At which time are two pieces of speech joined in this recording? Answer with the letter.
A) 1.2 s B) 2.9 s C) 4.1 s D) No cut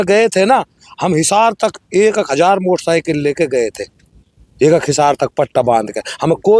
D